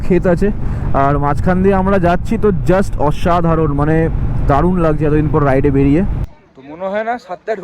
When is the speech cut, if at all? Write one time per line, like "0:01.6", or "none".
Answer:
0:06.2